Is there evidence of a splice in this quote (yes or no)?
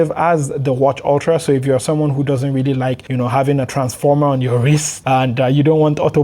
yes